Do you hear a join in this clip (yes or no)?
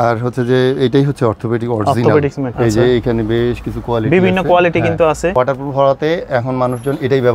yes